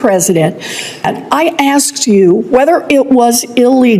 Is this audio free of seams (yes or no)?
no